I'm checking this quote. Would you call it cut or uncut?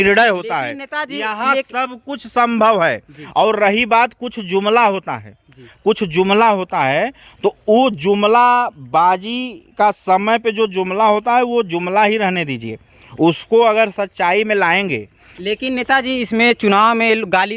uncut